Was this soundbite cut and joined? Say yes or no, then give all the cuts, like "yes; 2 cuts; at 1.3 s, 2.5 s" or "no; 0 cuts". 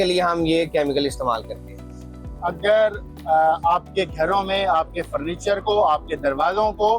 no; 0 cuts